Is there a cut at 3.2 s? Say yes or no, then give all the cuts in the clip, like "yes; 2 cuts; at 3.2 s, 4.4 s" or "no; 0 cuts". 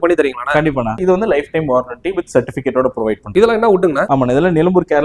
yes; 3 cuts; at 1.0 s, 3.2 s, 4.0 s